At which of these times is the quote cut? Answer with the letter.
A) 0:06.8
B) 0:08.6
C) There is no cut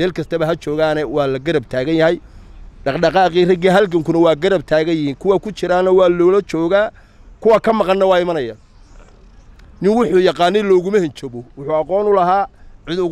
C